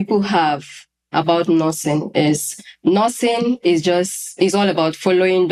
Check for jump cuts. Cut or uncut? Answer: uncut